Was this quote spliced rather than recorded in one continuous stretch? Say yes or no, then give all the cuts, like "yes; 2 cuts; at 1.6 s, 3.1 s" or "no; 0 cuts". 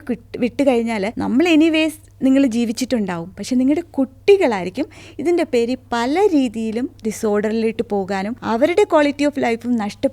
yes; 2 cuts; at 1.1 s, 8.3 s